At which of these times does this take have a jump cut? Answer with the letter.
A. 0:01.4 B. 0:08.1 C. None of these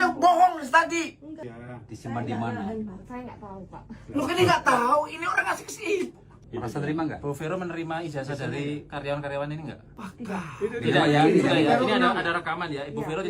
A